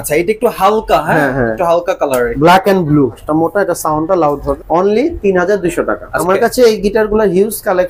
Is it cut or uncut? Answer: cut